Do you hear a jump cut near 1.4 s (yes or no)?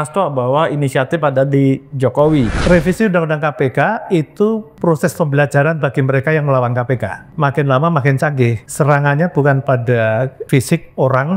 no